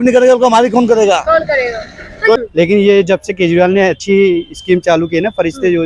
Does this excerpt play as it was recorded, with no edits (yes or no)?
no